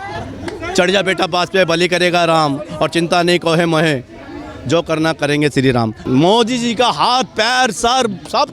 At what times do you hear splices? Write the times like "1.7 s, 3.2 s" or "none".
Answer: 6.0 s